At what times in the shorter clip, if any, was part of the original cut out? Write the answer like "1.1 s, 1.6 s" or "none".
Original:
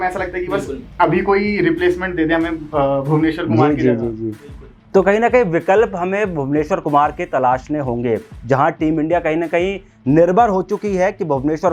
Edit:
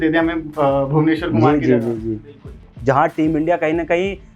2.6 s

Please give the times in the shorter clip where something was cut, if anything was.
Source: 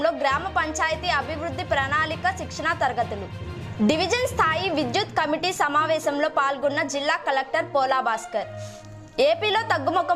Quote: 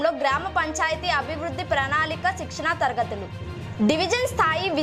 none

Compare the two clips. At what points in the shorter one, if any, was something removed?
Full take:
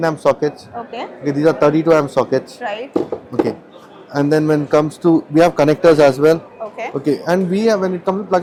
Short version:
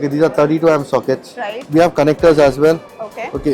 1.6 s

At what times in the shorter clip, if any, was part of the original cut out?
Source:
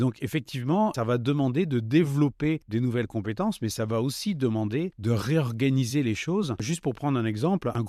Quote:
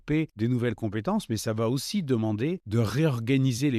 none

